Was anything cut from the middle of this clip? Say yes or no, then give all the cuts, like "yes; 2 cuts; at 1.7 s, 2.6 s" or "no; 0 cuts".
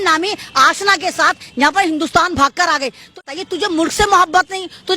yes; 1 cut; at 3.2 s